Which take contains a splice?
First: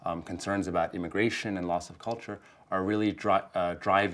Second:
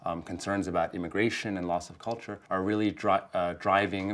second; 1 cut; at 2.3 s

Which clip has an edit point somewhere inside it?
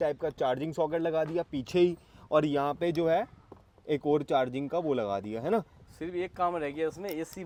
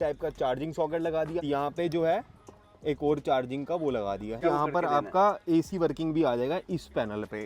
second; 2 cuts; at 1.5 s, 4.4 s

